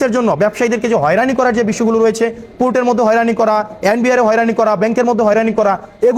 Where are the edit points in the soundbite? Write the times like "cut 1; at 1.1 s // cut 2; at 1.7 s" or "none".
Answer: none